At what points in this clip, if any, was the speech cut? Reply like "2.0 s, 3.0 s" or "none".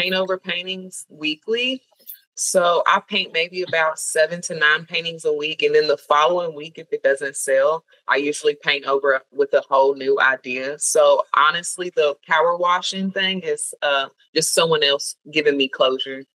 none

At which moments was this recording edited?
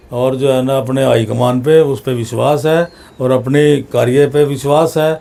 none

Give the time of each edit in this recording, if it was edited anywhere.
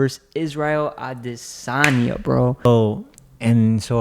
2.6 s

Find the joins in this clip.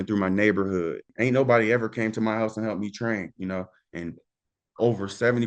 1.1 s

